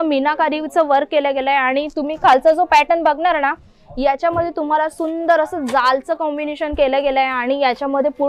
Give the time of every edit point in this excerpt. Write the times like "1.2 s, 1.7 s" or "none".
none